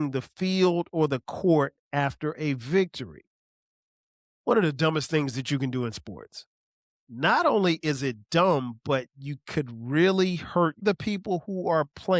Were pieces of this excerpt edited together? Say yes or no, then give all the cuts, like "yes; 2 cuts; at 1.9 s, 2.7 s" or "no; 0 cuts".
yes; 1 cut; at 10.8 s